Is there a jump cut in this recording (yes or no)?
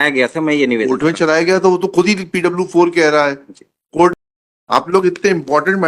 yes